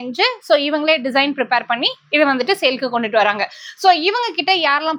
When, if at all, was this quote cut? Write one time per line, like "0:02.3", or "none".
none